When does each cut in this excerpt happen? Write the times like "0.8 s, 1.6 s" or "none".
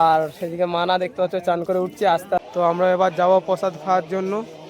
2.5 s

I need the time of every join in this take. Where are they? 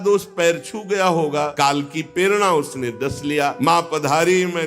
1.5 s, 3.6 s

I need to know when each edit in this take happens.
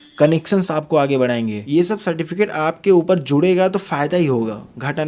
1.6 s

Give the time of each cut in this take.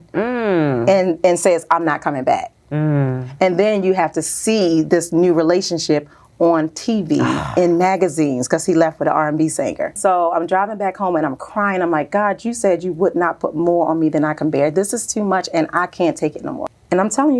10.0 s, 16.6 s

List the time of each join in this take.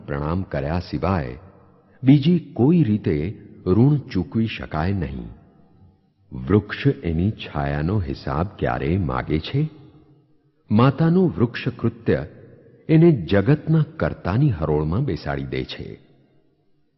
none

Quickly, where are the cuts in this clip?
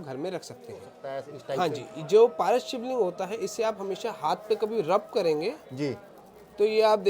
0.9 s

